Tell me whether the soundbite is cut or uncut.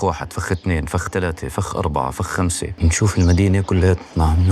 cut